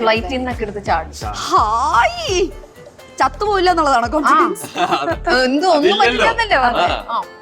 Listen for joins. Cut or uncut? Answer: cut